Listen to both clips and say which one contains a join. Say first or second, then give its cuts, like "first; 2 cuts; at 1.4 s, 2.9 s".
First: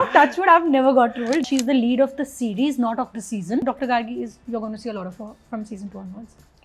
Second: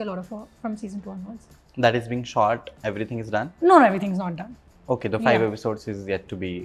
first; 2 cuts; at 1.4 s, 3.6 s